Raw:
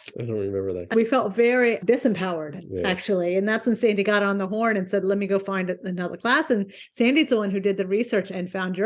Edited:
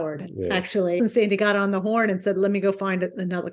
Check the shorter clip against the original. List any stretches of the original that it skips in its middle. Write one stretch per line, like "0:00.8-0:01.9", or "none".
0:03.3-0:03.6